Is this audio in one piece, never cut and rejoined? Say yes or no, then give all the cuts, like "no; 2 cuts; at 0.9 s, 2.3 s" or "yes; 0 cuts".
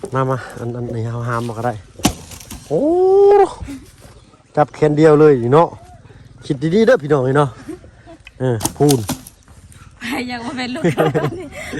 yes; 0 cuts